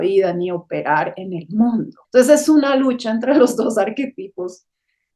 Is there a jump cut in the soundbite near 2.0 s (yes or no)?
yes